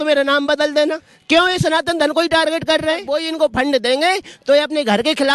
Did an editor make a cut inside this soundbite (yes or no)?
yes